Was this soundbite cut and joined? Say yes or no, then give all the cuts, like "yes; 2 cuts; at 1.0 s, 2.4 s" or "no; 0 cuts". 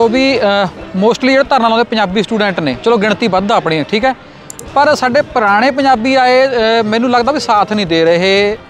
no; 0 cuts